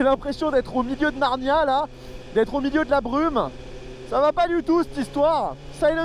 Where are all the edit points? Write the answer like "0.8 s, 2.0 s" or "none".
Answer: none

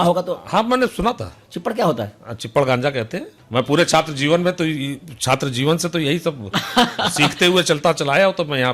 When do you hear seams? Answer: 3.3 s

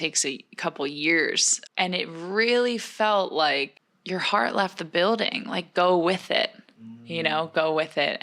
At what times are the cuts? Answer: 1.5 s

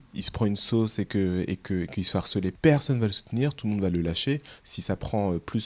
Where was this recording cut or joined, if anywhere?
2.5 s

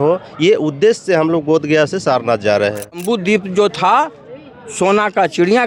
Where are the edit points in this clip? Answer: 3.0 s

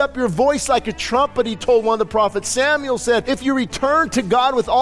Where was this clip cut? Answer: 3.2 s

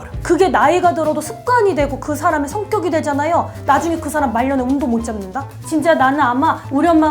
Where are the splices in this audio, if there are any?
5.6 s

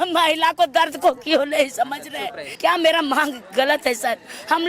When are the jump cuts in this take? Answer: 2.4 s

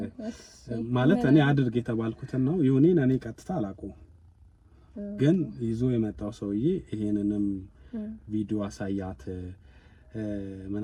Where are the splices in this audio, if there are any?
none

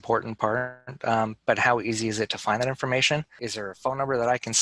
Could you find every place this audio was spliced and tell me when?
3.4 s

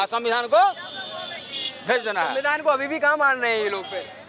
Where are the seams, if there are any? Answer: none

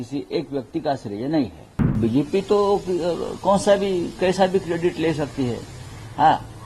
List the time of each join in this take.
2.0 s

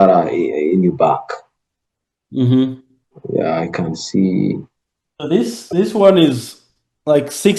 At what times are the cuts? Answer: none

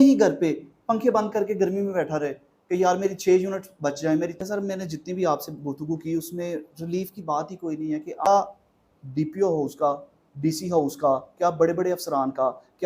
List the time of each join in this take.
4.3 s, 8.3 s

